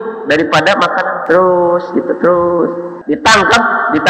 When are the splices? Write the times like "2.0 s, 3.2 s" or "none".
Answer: 1.2 s, 2.9 s